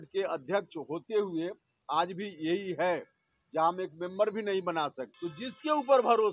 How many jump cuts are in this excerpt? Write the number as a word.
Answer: one